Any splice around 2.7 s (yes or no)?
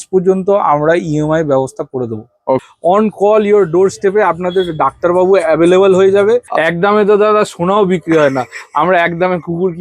yes